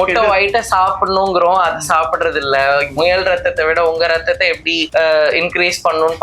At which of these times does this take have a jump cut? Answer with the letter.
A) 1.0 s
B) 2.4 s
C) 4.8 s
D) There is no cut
C